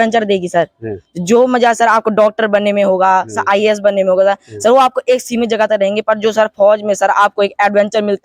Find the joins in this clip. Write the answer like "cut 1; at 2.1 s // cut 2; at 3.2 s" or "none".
none